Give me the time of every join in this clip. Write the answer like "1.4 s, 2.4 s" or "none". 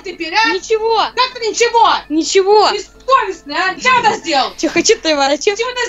3.8 s